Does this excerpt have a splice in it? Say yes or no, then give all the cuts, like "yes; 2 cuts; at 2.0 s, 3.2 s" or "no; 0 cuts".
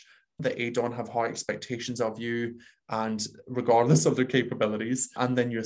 no; 0 cuts